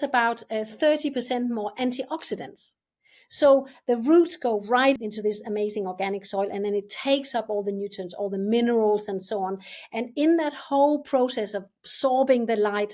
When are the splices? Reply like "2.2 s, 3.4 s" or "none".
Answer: 5.0 s